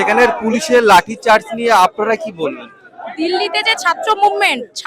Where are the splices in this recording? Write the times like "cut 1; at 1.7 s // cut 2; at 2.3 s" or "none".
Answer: none